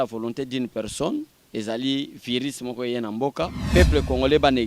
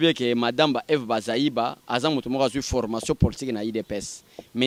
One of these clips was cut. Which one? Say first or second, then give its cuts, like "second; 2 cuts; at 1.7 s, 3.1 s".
first; 1 cut; at 3.6 s